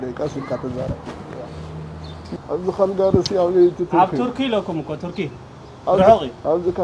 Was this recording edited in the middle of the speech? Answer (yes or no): yes